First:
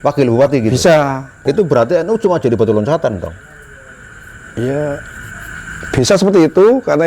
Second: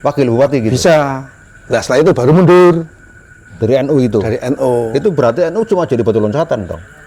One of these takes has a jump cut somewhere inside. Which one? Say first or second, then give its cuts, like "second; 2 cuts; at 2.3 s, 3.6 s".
first; 1 cut; at 1.4 s